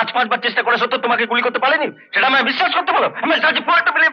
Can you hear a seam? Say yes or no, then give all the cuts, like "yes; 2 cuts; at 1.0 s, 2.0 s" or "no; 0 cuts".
no; 0 cuts